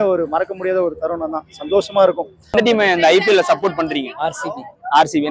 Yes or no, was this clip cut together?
yes